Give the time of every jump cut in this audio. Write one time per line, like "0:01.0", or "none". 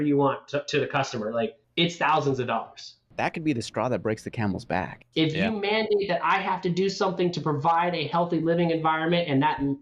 0:01.6
0:03.0
0:05.0